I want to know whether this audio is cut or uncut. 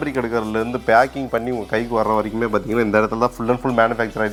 uncut